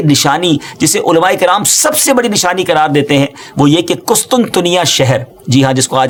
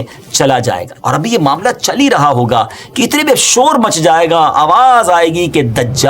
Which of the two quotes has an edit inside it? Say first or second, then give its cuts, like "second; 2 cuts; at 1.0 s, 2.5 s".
second; 1 cut; at 0.9 s